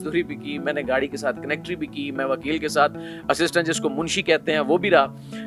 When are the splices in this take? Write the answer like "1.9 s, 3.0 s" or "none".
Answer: none